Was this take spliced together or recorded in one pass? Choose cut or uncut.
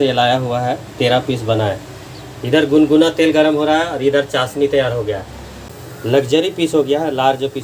cut